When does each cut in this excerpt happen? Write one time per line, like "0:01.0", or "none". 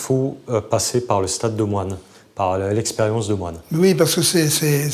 none